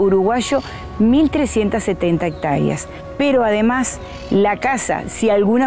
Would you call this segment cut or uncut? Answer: cut